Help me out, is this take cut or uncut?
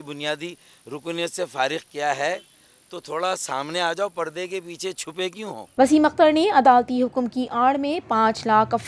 uncut